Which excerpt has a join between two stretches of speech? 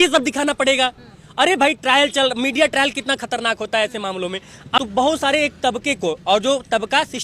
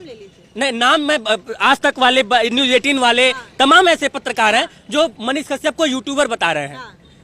first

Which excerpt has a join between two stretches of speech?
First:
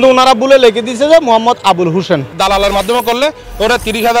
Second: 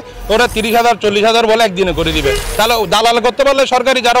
first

